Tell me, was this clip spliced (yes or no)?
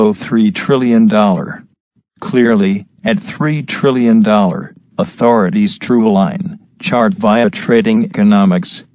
yes